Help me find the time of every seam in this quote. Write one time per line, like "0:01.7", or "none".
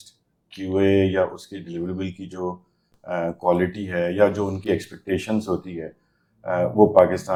none